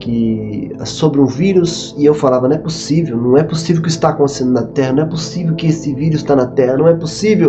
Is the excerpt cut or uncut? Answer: uncut